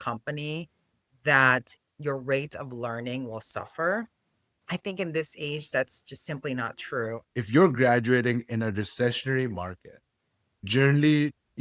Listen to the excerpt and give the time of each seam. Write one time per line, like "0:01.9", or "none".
0:07.2
0:10.7